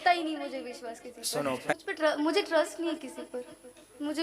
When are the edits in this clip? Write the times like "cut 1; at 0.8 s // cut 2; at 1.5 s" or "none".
cut 1; at 1.7 s